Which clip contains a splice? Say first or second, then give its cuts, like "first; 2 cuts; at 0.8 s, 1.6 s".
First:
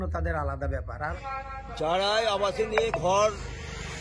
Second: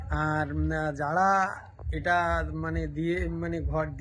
first; 1 cut; at 1.1 s